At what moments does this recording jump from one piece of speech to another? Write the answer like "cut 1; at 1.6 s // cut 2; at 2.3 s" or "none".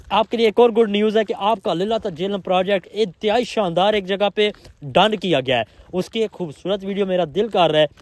none

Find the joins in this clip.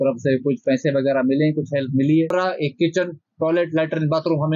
cut 1; at 2.3 s

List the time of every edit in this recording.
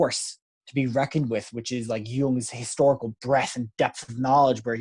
none

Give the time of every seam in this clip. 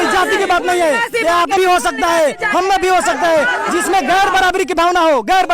cut 1; at 1.5 s

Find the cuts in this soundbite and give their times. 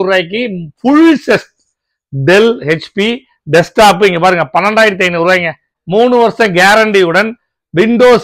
cut 1; at 5.7 s

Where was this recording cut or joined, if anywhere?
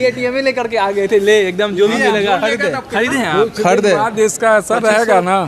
none

